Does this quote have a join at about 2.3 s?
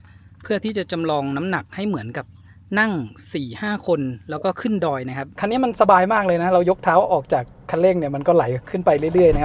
no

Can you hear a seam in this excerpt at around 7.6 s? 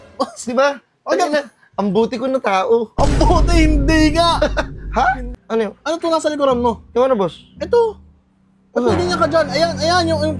no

